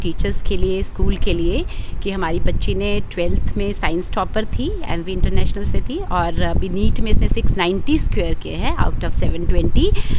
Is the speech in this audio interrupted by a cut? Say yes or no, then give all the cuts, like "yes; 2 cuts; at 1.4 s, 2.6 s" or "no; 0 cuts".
no; 0 cuts